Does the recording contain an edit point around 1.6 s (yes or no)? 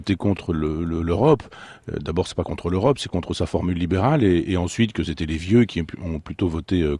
yes